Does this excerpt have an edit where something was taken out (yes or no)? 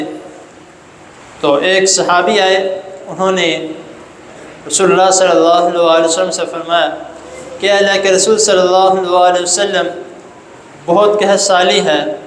no